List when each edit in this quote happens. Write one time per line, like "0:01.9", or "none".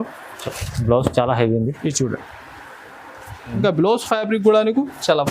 0:03.5